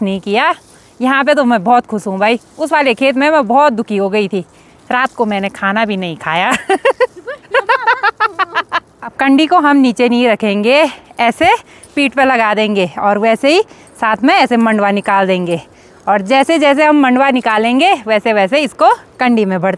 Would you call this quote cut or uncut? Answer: uncut